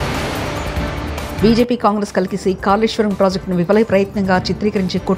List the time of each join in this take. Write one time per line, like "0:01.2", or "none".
0:01.3